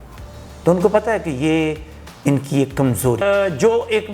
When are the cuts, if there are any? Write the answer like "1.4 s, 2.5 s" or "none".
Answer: 3.2 s